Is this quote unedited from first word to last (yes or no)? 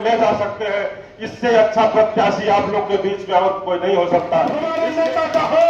no